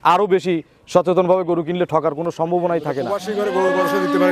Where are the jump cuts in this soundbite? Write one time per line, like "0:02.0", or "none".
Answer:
0:03.1